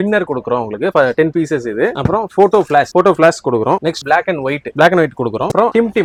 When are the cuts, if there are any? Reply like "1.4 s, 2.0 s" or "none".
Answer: none